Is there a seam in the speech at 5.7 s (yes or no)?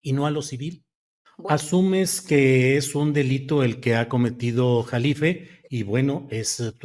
no